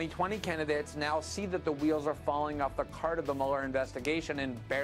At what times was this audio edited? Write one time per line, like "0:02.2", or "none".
none

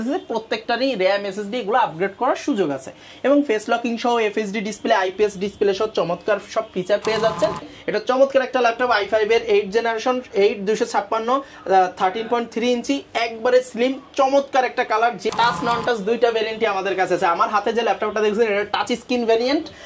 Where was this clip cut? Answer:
0:07.7
0:15.3

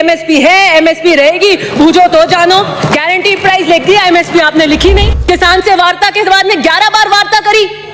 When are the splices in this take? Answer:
0:05.1

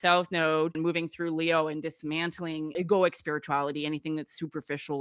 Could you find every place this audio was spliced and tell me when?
0:00.8
0:02.7

